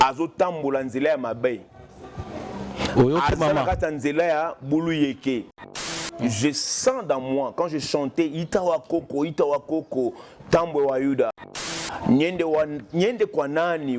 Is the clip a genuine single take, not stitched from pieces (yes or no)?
no